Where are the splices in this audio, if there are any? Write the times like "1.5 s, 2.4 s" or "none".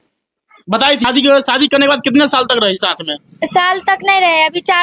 1.0 s